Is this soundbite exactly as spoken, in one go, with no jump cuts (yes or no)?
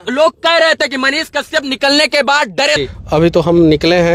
no